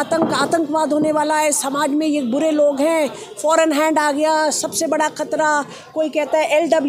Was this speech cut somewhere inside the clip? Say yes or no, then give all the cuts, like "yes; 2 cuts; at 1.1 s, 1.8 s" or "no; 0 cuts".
no; 0 cuts